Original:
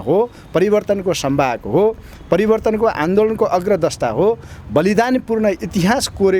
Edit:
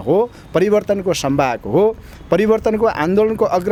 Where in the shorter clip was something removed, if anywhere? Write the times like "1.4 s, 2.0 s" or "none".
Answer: none